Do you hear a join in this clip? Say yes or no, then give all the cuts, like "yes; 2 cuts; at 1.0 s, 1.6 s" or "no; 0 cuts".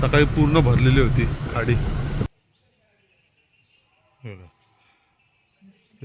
yes; 1 cut; at 2.3 s